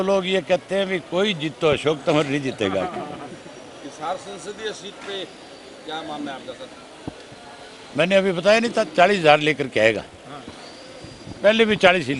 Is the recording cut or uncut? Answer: uncut